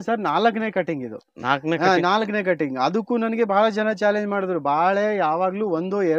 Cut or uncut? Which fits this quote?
uncut